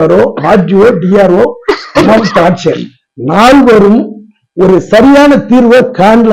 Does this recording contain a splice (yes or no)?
no